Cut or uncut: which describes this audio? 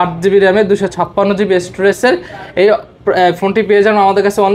uncut